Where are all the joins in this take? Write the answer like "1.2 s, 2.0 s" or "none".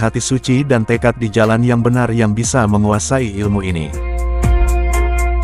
4.4 s